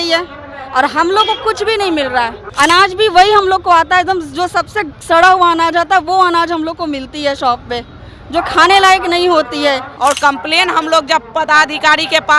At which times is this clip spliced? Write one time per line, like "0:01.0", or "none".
0:02.4
0:09.9

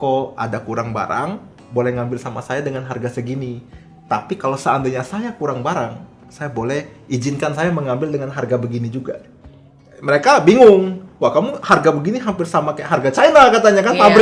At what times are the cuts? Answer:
none

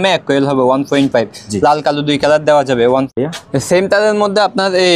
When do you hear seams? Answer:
0:02.9

